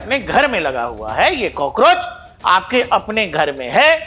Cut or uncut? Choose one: uncut